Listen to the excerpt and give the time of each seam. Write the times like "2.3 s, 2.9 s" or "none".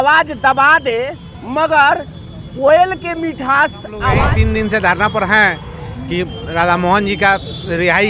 4.1 s